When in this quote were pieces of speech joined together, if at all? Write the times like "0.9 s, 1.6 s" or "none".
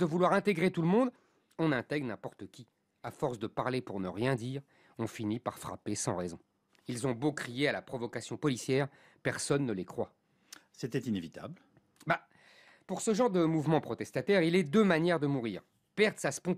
none